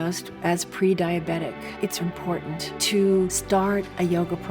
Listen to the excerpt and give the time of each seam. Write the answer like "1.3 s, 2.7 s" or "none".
2.0 s

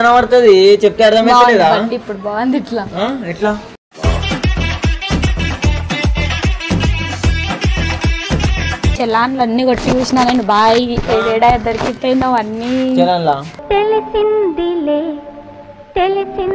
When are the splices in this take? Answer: 8.9 s

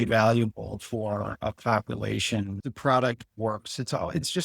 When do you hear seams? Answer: 2.6 s

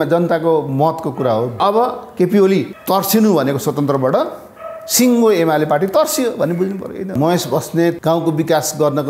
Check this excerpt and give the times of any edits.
1.6 s, 2.7 s, 7.1 s, 8.0 s

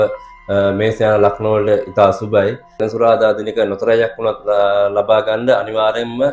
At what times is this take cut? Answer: 2.8 s

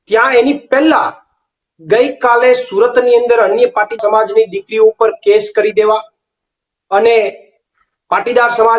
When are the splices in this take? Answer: none

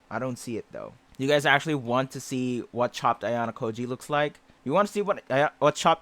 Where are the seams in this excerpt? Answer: 1.0 s, 4.5 s

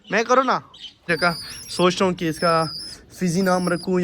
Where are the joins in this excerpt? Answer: 1.1 s

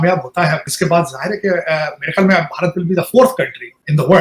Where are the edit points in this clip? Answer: none

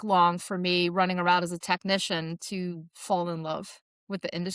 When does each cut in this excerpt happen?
none

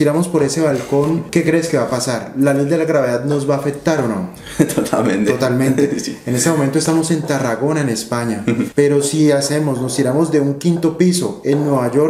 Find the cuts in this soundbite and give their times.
1.2 s, 8.7 s

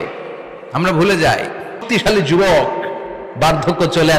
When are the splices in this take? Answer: 1.8 s

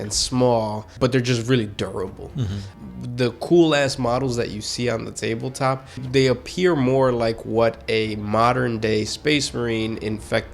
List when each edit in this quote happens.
0.9 s, 2.6 s, 6.0 s

